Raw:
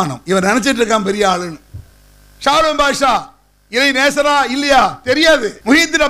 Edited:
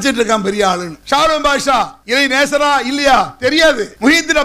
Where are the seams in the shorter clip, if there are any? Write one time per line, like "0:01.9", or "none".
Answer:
0:00.9
0:02.0